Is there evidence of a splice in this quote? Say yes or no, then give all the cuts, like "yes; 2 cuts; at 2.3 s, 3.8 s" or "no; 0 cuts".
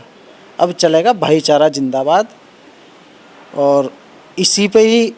no; 0 cuts